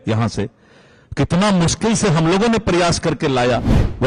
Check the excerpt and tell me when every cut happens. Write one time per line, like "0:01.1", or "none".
none